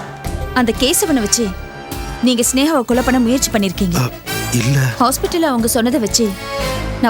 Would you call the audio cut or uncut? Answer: uncut